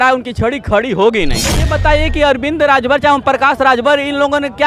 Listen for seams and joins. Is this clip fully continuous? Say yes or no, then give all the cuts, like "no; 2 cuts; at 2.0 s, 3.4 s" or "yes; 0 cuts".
no; 1 cut; at 1.7 s